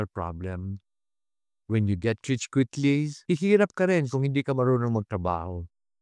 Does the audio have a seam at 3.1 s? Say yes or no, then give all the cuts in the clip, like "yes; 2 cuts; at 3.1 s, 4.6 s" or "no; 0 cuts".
yes; 1 cut; at 3.1 s